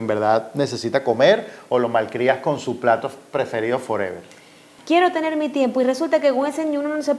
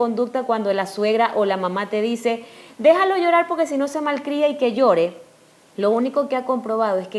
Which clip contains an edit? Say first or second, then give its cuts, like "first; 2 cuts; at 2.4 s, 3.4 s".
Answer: first; 1 cut; at 4.7 s